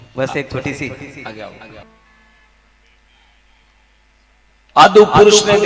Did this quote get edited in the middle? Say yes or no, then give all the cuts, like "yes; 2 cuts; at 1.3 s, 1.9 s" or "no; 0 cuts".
yes; 1 cut; at 1.8 s